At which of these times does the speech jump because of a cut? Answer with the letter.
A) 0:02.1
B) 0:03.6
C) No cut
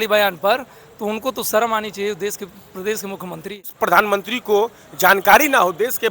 B